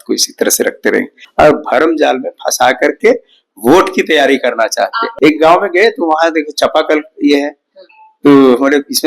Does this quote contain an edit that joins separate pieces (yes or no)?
yes